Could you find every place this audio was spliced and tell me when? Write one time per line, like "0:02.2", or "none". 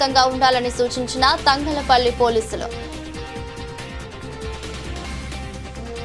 0:02.7
0:04.3